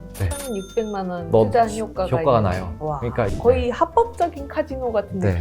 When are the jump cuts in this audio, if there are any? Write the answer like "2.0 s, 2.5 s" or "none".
3.3 s